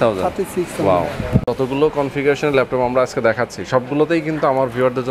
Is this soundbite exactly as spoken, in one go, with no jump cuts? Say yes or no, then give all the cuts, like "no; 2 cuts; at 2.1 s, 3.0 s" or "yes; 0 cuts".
no; 1 cut; at 1.4 s